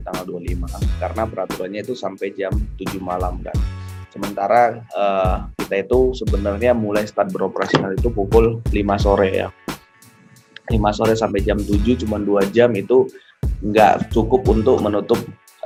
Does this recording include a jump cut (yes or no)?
no